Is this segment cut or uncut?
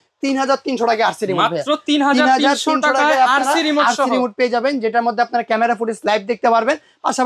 uncut